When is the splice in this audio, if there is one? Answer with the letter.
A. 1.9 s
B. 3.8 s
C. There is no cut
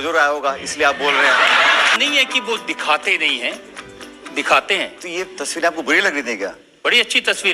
A